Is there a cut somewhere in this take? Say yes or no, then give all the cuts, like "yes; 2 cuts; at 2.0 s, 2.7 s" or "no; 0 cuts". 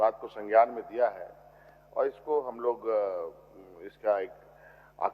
no; 0 cuts